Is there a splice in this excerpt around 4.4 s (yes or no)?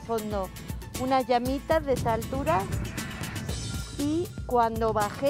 yes